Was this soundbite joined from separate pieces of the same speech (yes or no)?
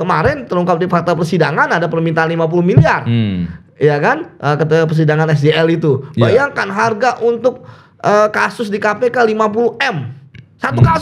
no